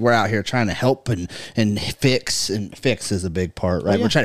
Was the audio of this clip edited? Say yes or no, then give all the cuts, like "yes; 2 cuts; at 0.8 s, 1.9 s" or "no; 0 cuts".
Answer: no; 0 cuts